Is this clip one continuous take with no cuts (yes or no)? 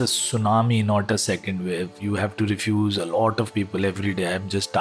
no